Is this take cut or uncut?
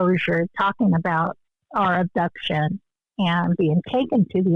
uncut